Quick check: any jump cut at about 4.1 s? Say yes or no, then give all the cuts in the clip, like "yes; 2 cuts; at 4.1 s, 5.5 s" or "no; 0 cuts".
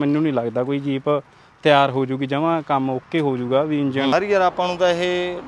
yes; 1 cut; at 4.1 s